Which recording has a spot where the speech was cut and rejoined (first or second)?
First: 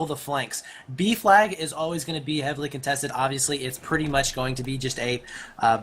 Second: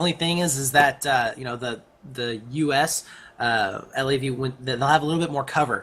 first